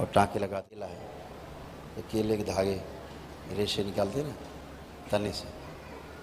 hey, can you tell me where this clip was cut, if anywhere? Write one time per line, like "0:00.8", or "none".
0:00.9